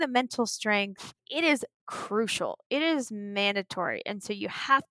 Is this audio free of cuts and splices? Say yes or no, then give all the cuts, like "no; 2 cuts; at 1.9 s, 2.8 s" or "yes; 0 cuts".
no; 1 cut; at 1.2 s